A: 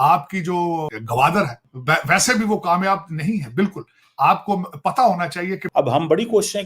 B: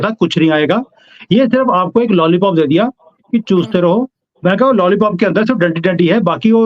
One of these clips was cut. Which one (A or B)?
A